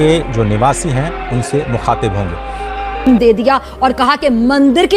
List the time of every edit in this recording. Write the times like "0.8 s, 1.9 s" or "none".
3.0 s